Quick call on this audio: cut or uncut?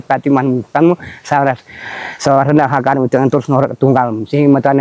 uncut